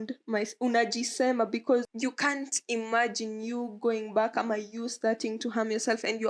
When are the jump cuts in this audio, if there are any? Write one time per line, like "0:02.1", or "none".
0:01.9